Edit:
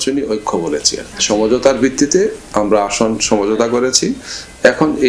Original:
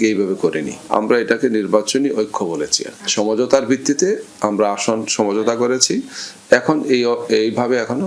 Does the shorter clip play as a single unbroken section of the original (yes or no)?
yes